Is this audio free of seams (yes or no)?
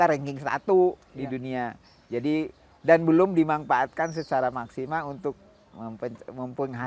yes